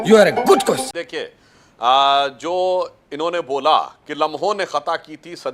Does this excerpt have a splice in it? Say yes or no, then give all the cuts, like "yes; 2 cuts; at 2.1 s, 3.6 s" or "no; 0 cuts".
yes; 1 cut; at 0.9 s